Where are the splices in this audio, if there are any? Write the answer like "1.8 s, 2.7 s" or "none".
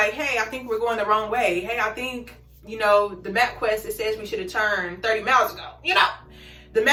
none